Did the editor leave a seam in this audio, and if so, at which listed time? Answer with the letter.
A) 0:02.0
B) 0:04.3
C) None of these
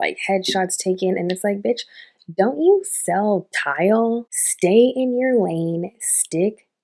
B